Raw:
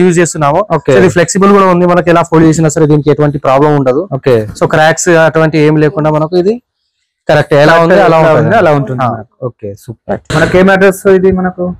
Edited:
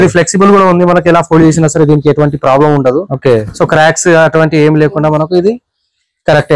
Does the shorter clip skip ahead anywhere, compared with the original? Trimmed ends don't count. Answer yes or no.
no